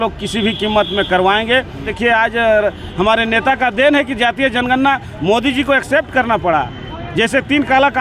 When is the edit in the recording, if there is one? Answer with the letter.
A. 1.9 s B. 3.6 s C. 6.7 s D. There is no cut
A